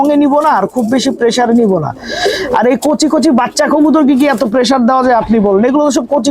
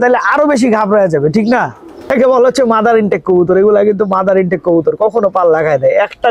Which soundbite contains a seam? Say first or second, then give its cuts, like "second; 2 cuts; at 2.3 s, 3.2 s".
second; 1 cut; at 2.1 s